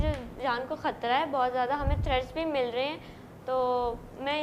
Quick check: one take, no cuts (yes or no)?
yes